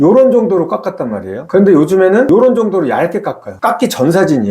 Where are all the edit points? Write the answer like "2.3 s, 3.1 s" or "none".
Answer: 1.4 s